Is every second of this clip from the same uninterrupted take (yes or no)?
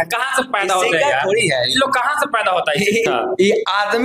no